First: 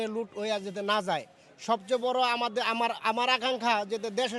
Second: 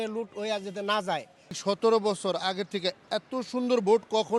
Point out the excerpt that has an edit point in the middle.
second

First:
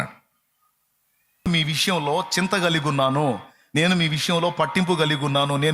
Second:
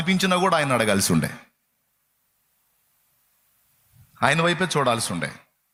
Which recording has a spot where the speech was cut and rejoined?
first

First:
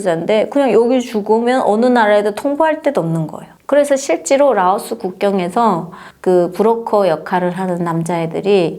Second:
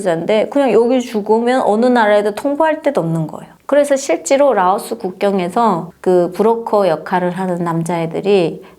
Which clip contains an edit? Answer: second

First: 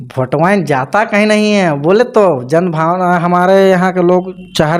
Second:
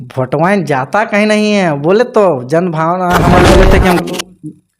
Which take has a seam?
second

